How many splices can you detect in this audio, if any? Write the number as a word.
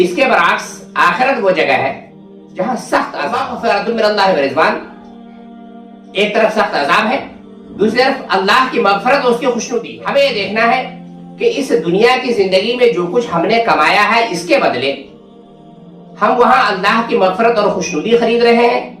two